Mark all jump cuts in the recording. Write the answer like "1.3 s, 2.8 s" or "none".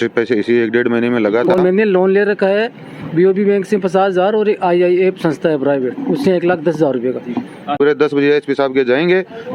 1.5 s, 7.8 s